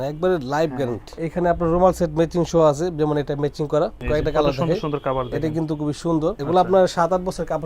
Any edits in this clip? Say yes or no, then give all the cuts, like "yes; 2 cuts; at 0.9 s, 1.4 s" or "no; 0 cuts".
yes; 3 cuts; at 1.2 s, 4.0 s, 6.4 s